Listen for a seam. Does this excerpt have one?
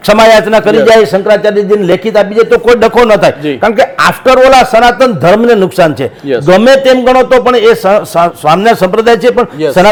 no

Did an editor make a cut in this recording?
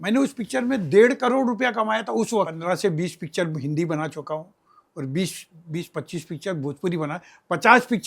yes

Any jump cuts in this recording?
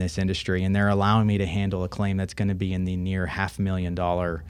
no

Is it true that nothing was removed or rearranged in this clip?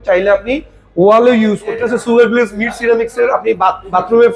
no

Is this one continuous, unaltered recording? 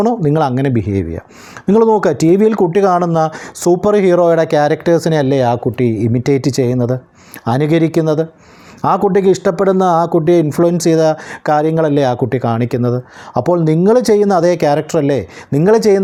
yes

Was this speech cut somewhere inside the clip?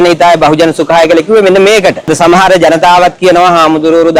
yes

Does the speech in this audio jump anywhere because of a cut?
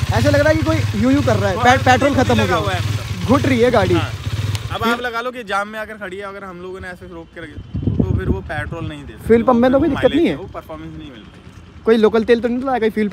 no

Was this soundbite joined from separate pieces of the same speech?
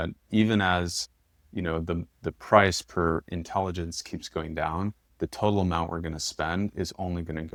no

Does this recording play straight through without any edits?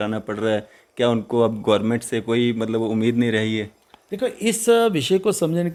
yes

